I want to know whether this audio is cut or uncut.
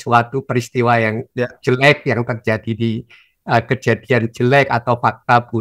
uncut